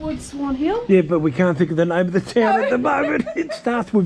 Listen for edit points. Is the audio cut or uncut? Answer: uncut